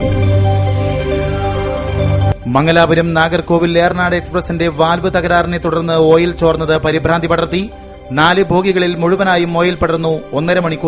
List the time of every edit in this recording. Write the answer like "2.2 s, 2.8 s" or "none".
2.4 s